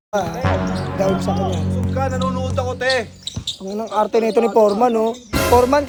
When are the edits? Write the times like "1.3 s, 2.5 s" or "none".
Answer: none

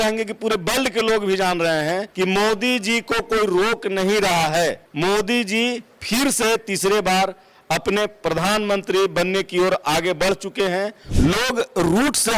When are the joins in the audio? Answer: 2.1 s, 4.9 s, 11.0 s

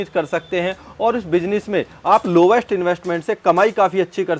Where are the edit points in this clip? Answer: none

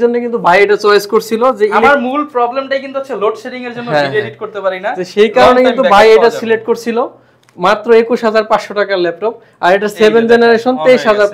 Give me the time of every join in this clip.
none

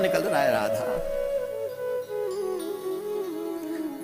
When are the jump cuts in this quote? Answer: none

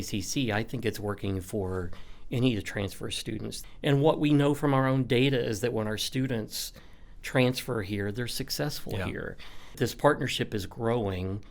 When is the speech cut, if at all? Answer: 3.6 s, 9.8 s

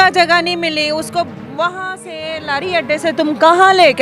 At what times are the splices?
none

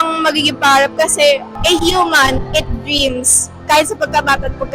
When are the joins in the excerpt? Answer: 1.5 s

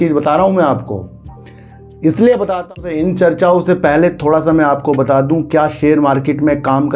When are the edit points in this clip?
2.6 s

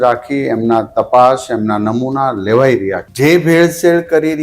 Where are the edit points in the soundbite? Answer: 3.0 s

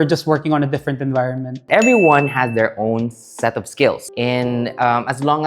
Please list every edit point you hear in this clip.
1.6 s, 4.1 s

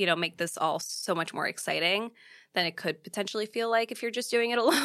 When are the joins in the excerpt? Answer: none

